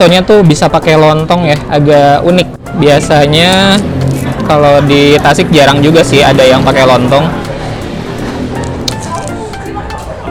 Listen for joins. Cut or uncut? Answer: uncut